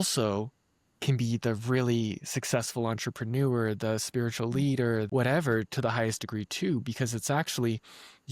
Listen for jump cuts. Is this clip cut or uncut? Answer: cut